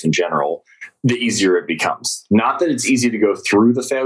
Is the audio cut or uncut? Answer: uncut